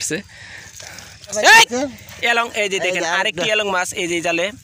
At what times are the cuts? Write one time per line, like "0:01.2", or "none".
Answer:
0:01.3